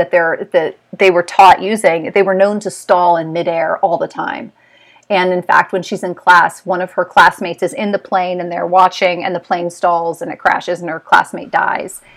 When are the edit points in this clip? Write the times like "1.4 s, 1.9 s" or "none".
none